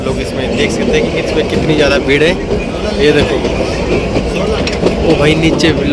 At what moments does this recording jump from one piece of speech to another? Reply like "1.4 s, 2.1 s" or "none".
none